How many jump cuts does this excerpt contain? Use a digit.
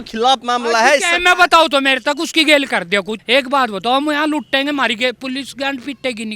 1